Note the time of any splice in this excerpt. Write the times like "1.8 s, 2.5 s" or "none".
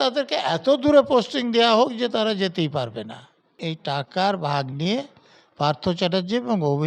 3.6 s